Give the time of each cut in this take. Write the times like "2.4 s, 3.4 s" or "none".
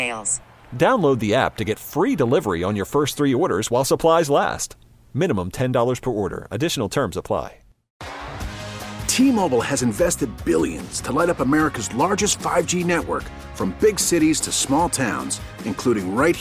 7.8 s